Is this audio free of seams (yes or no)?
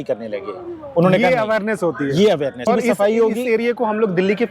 no